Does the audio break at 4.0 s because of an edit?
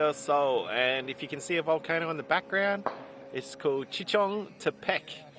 no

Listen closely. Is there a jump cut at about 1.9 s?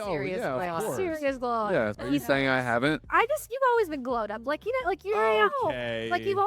yes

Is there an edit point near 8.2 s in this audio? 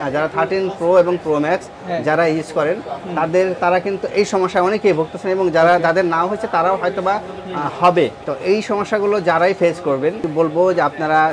yes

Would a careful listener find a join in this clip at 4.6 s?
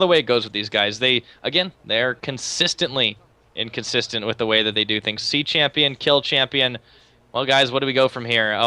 yes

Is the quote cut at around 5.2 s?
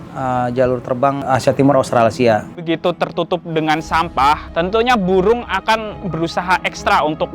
no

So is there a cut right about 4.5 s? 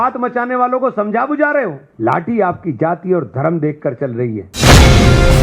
yes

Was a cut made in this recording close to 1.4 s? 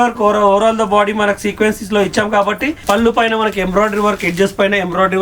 no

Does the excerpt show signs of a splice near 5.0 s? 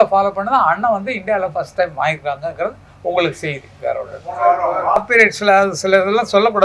yes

